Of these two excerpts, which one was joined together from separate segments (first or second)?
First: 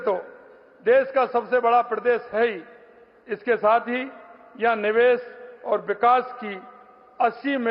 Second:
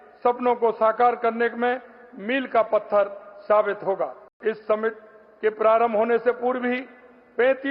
second